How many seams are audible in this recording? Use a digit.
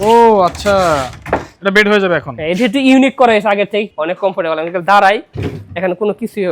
1